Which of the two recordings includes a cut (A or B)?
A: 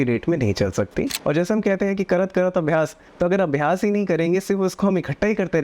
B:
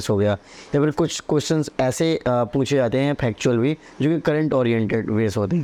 A